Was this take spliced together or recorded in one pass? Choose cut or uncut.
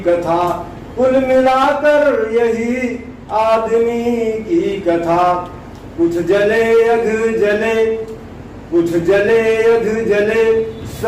uncut